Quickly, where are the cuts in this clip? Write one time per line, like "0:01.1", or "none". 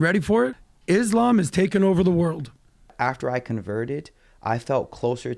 0:02.9